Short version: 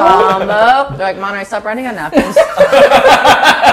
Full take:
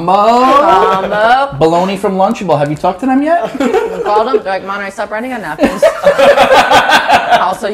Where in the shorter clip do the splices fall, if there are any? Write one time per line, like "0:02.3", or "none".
0:01.0